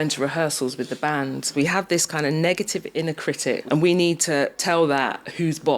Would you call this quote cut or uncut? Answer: cut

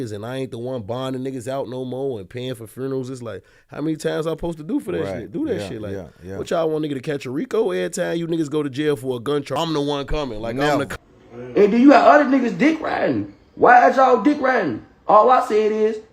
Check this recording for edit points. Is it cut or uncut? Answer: cut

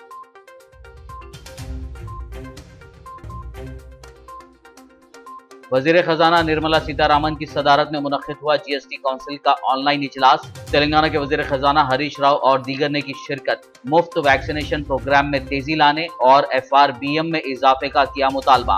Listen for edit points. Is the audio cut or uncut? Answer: cut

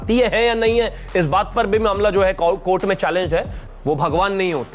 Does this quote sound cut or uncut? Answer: cut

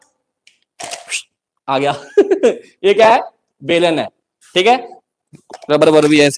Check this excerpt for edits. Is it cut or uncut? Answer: uncut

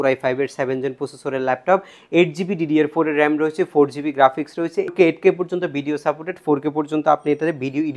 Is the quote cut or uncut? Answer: cut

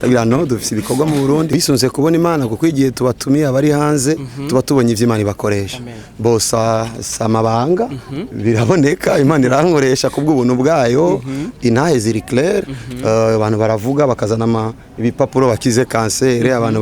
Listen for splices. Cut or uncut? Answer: cut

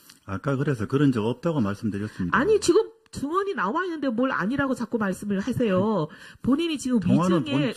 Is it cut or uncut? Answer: uncut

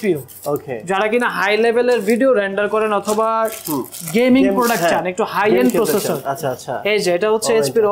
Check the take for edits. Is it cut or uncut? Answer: uncut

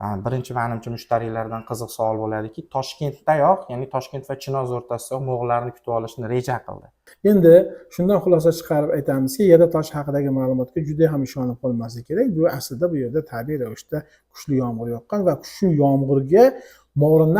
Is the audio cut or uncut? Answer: cut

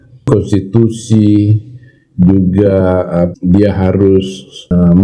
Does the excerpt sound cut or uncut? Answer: uncut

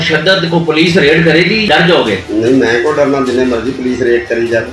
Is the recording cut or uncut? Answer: cut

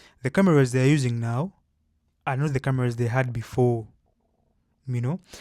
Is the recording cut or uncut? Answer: uncut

